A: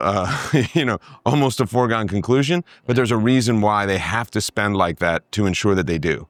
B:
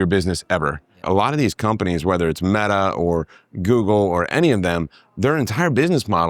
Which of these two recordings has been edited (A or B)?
B